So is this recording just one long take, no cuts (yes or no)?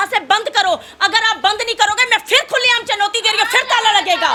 yes